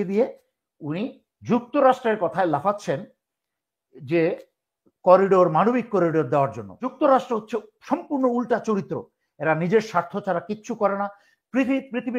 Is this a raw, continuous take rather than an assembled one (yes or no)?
no